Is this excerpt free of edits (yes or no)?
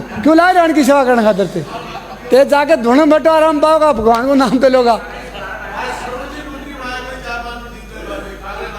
yes